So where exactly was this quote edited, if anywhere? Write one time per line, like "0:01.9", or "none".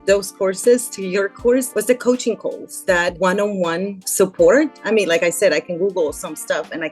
0:03.2
0:04.8